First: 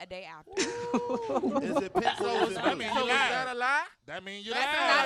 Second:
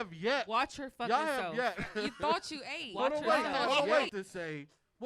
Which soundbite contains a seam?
second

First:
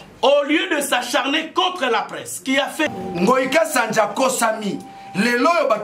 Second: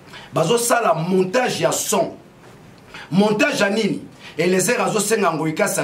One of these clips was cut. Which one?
first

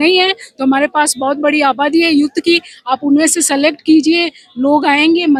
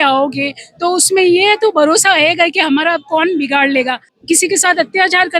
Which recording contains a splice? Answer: second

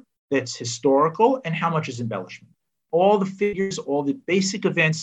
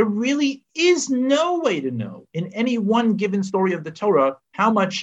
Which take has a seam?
first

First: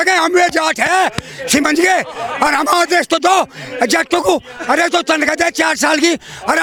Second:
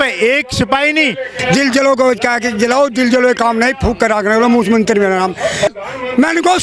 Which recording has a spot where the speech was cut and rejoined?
second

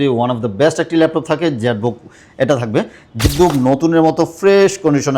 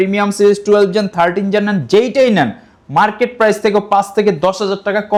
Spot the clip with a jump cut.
first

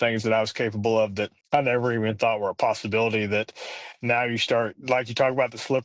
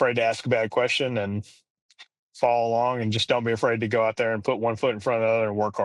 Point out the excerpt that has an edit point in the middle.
first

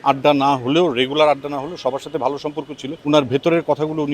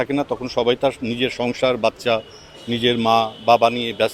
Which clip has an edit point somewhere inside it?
first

